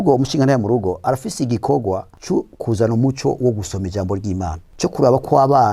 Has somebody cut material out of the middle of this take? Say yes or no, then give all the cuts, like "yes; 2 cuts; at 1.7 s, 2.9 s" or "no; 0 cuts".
yes; 2 cuts; at 2.1 s, 4.6 s